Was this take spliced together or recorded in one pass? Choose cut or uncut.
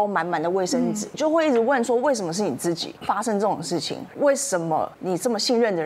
cut